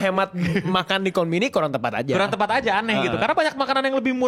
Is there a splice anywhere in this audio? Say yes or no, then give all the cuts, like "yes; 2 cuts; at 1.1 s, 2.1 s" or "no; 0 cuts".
no; 0 cuts